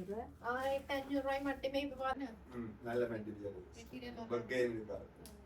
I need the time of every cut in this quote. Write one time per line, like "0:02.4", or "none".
0:02.2